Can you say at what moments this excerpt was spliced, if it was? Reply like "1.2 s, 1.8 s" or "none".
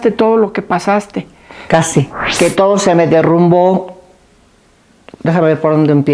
2.2 s